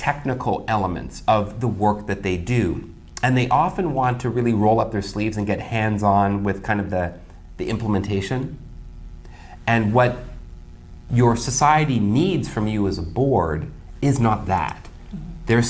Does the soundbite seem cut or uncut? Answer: uncut